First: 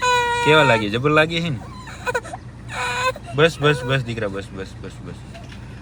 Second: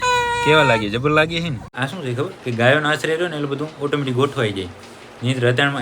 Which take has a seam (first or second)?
second